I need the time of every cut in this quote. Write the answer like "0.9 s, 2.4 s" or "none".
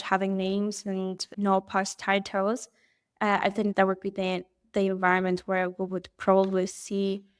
1.3 s, 3.7 s